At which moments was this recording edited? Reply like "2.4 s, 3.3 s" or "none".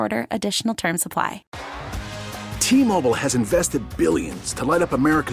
1.5 s